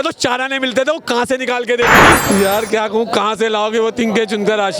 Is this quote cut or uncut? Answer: cut